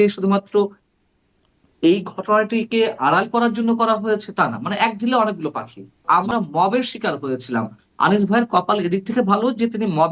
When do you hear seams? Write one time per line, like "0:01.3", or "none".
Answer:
0:06.0